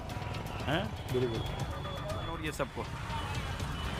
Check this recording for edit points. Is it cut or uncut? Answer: cut